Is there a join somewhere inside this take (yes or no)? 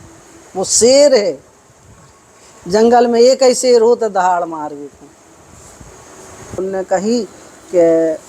yes